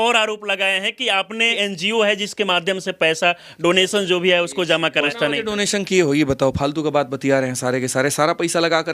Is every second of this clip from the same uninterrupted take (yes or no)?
no